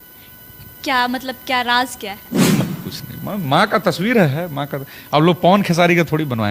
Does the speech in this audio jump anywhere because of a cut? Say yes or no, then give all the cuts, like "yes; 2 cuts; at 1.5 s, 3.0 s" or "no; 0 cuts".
yes; 1 cut; at 2.6 s